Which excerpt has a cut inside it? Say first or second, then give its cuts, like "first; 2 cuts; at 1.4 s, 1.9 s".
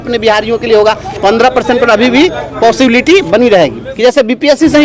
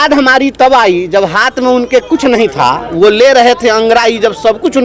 first; 1 cut; at 3.8 s